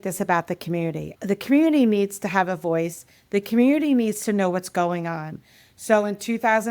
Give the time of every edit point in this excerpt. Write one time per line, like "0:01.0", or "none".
0:01.1